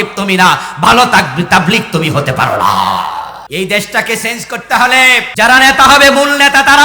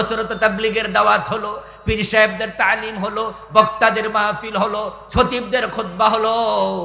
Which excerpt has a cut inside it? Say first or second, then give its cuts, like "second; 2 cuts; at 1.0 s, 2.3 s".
first; 2 cuts; at 3.4 s, 5.3 s